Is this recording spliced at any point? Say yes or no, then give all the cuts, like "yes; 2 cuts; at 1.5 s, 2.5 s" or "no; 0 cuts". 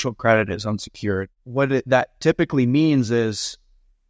yes; 1 cut; at 1.4 s